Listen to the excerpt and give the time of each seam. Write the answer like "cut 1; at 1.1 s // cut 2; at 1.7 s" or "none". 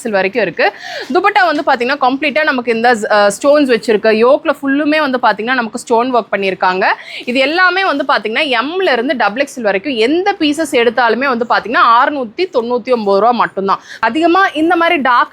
cut 1; at 14.0 s